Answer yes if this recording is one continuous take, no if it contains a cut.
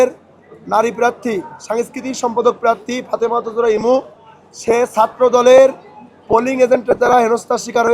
yes